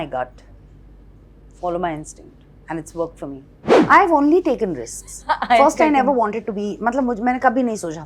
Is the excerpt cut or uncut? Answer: cut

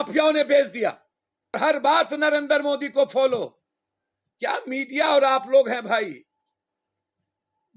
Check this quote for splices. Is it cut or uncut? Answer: cut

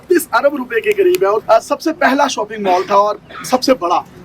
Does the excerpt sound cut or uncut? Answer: cut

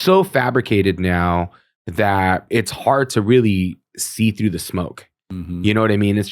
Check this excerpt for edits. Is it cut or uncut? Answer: cut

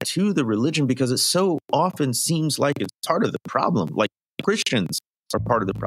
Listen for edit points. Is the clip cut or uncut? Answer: uncut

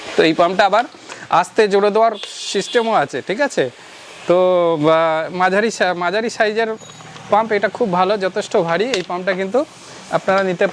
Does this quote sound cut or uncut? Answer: uncut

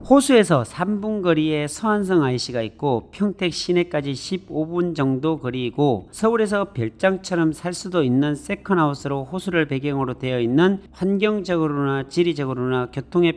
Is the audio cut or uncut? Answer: uncut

